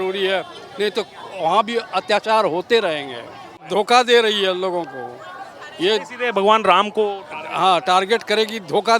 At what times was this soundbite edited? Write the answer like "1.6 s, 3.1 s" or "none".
3.5 s